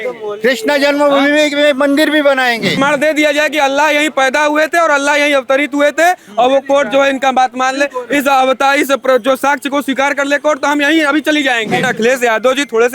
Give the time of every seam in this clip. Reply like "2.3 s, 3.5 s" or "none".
2.8 s, 11.9 s